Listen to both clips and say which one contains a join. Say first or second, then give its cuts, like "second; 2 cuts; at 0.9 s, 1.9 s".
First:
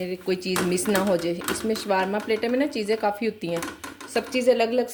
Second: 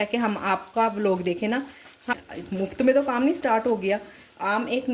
second; 1 cut; at 2.1 s